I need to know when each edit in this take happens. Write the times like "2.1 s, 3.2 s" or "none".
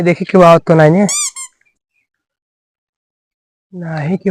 none